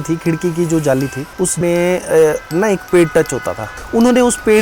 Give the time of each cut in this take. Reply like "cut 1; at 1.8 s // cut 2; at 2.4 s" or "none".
cut 1; at 1.6 s // cut 2; at 3.7 s